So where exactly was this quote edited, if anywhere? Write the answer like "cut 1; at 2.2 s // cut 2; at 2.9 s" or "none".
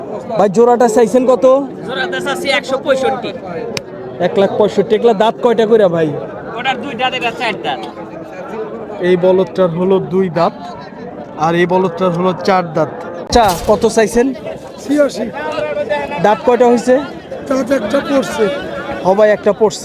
cut 1; at 13.2 s